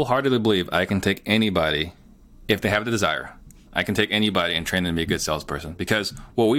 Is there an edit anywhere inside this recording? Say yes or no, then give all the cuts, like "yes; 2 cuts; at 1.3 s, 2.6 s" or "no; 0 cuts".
no; 0 cuts